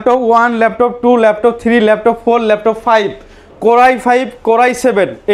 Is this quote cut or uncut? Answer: uncut